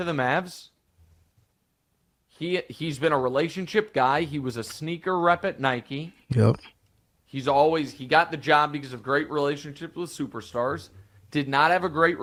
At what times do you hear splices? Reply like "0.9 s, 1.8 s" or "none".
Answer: none